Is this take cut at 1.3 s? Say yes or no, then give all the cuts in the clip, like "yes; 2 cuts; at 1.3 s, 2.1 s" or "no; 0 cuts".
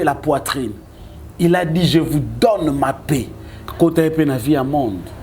no; 1 cut; at 3.6 s